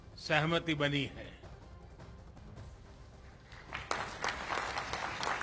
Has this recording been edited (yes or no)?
no